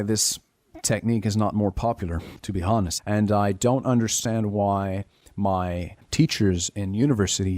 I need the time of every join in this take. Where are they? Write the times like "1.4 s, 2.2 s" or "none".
3.0 s, 6.0 s